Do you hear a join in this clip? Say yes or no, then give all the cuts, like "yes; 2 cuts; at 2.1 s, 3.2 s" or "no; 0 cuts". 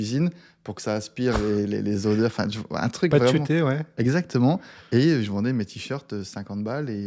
no; 0 cuts